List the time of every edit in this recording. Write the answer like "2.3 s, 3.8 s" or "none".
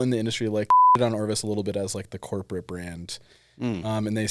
1.0 s